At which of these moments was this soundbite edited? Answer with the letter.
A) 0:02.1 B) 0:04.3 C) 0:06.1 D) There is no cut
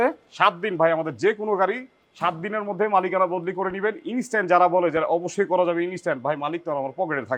D